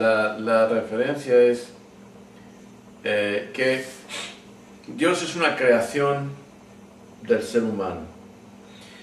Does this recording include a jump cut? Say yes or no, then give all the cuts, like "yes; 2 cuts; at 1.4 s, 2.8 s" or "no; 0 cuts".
yes; 1 cut; at 3.0 s